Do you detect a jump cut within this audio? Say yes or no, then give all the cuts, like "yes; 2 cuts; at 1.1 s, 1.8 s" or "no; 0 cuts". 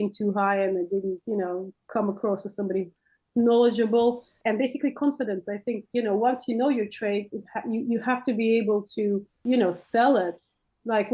yes; 2 cuts; at 4.4 s, 9.3 s